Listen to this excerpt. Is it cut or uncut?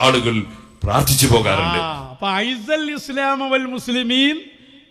uncut